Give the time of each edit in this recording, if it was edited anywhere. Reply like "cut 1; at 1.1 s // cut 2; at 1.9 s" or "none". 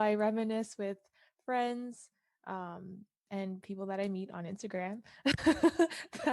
cut 1; at 3.1 s